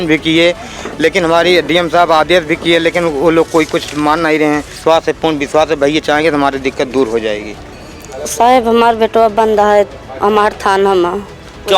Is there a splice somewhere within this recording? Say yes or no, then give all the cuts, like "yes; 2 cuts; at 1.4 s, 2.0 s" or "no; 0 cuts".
yes; 2 cuts; at 4.7 s, 7.6 s